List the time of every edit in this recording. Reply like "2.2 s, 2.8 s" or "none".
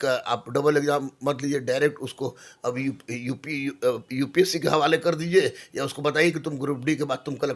none